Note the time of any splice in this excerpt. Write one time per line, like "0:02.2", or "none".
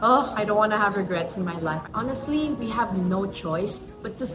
0:01.8